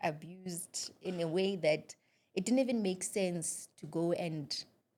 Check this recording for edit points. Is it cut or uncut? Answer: uncut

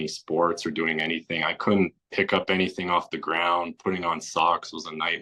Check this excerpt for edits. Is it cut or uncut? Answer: uncut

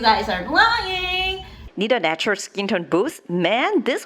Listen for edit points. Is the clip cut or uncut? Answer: cut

